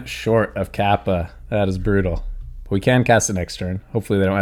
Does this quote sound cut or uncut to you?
uncut